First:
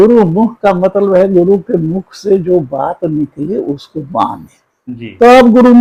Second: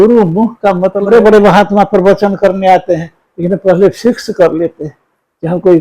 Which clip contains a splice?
second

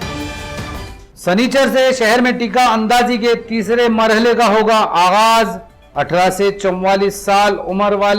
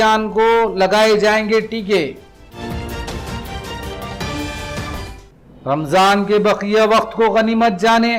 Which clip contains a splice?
first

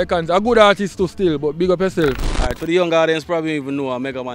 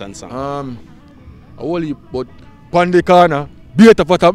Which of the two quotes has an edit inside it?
first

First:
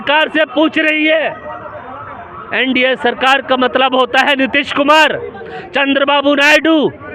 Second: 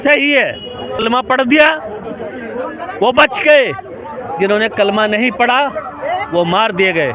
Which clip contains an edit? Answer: second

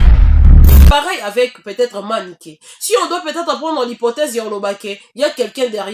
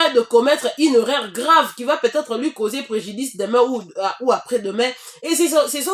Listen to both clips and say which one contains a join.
first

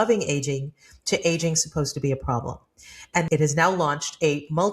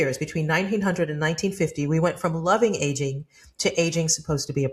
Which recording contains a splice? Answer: first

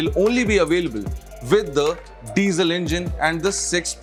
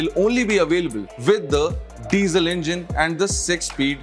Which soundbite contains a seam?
second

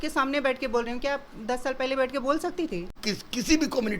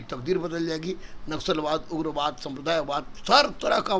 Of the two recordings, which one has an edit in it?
first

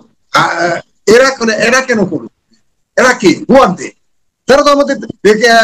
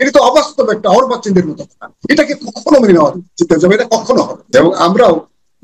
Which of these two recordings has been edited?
second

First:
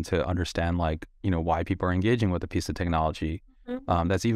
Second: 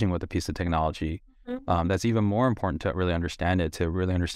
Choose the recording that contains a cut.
first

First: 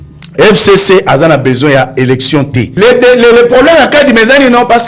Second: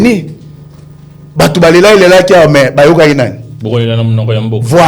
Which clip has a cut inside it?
first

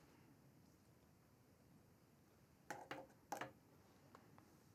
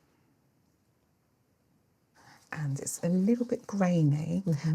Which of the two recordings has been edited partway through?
second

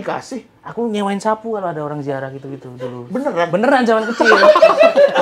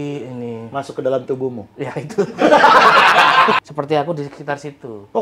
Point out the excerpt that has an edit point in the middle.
second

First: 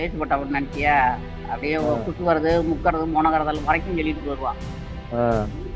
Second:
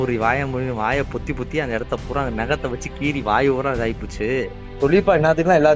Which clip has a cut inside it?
second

